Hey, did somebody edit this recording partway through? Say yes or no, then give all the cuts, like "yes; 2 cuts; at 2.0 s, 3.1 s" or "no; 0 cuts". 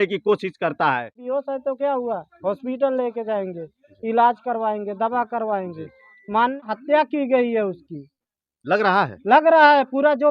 yes; 2 cuts; at 1.2 s, 6.7 s